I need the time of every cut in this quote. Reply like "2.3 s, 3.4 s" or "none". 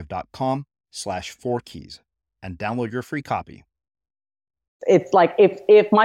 4.8 s

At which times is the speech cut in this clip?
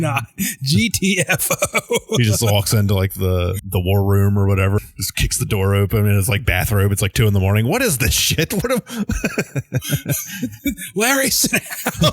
3.6 s, 4.8 s

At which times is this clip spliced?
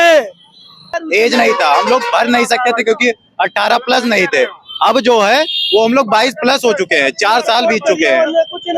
1.0 s

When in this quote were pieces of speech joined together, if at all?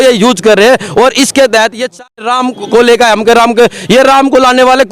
2.2 s

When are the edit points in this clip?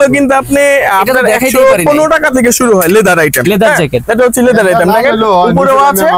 none

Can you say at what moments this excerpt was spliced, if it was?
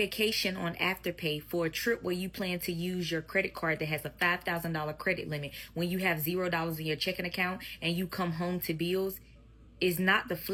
none

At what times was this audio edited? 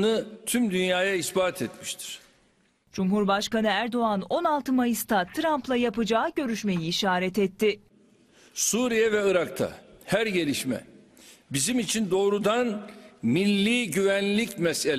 none

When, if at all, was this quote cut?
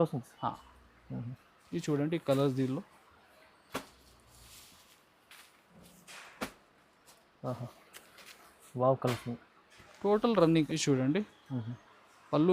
10.7 s

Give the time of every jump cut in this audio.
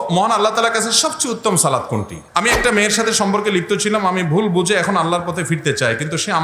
2.2 s

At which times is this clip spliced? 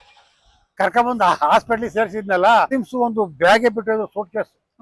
2.7 s

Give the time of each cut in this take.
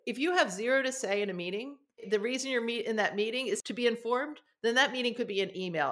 2.0 s, 3.7 s

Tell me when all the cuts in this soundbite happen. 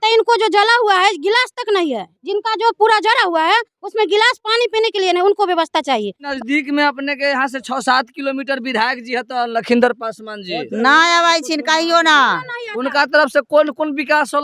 6.3 s

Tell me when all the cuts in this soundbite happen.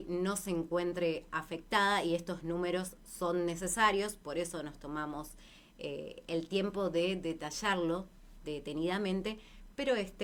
none

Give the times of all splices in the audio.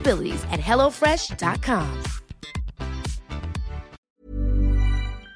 4.0 s

